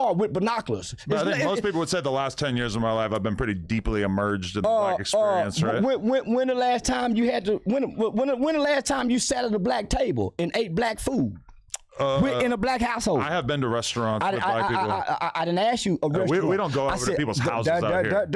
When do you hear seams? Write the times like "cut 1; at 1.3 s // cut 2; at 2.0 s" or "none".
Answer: cut 1; at 5.9 s